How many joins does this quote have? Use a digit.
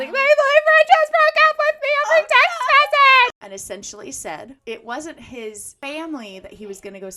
3